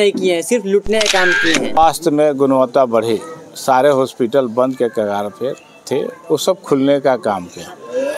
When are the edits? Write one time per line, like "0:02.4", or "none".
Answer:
0:01.8

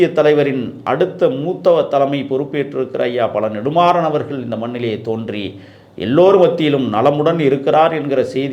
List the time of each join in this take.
none

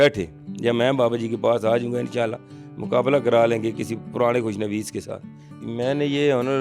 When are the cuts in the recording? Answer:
0:05.4

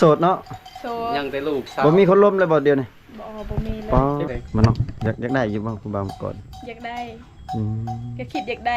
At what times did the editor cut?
0:04.3

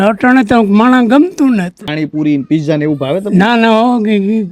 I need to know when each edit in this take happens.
0:01.8

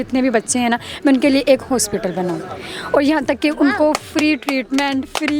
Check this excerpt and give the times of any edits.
none

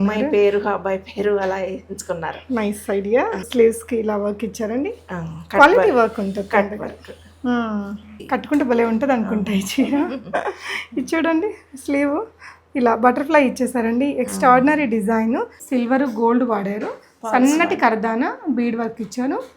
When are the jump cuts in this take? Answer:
0:03.5
0:08.1
0:15.6

